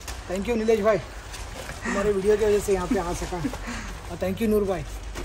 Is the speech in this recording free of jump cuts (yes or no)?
yes